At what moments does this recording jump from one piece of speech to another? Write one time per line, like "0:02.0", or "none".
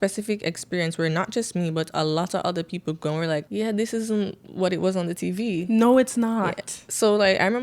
0:03.5

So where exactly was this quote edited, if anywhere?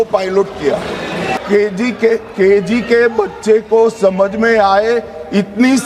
0:01.3

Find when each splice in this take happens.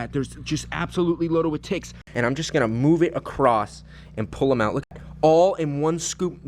0:02.0
0:04.9

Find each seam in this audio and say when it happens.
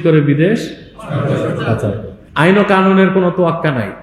0:02.2

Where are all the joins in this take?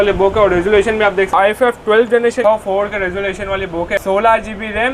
0:01.3
0:02.4
0:04.0

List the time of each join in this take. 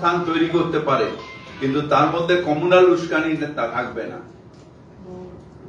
none

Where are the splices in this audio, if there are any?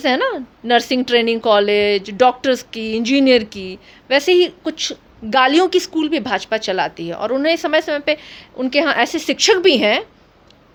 none

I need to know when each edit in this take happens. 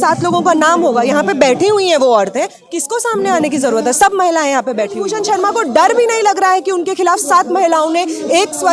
0:05.0

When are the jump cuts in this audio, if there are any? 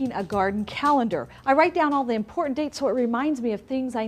0:01.9

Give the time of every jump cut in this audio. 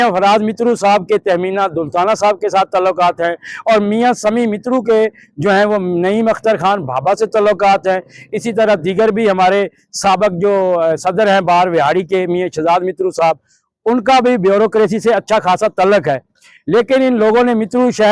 none

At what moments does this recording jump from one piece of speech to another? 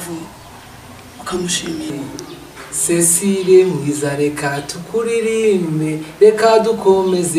0:02.0

